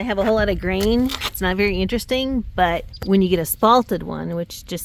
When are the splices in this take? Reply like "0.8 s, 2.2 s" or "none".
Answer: 2.9 s